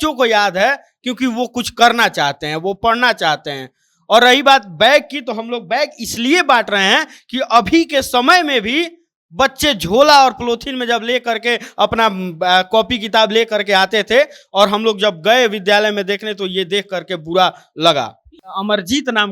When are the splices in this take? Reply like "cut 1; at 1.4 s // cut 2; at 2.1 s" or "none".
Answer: cut 1; at 18.4 s